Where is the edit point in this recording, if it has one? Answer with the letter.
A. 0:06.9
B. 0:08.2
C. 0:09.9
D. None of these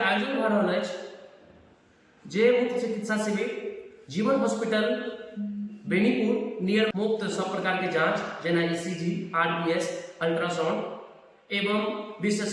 A